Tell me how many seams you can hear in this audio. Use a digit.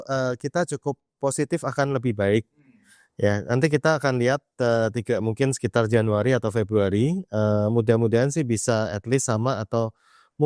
0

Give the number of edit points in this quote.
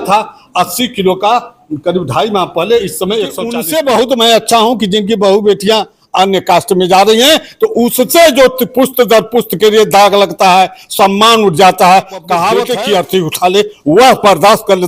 2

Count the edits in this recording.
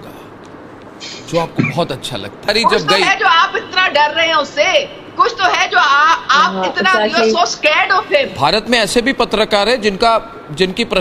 2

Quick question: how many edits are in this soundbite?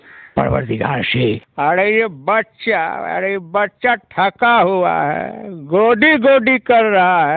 1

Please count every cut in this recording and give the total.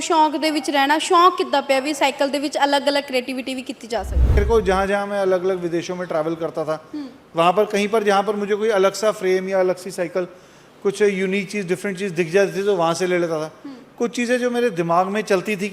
1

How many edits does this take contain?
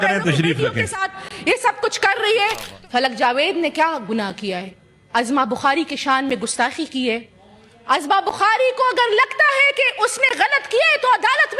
1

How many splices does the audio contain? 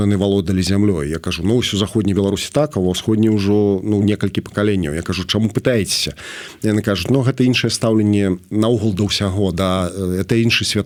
0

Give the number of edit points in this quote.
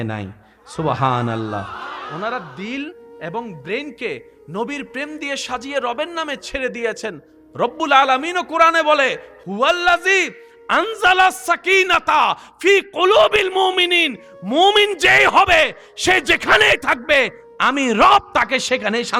0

